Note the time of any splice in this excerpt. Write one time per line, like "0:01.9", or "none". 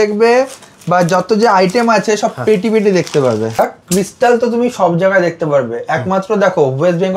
0:03.6